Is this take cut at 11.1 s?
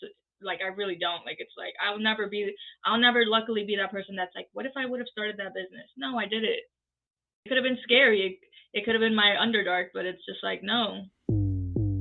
yes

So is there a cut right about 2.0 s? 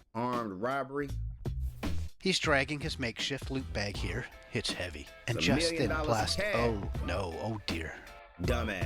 yes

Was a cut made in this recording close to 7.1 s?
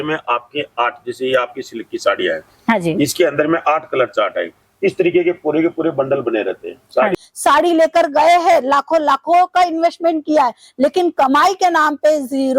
yes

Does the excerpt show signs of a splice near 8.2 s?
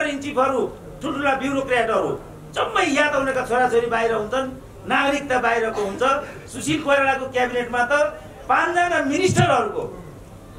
no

